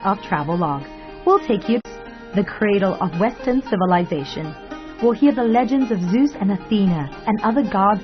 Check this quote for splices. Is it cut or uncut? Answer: cut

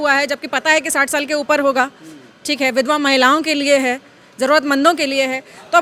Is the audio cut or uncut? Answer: uncut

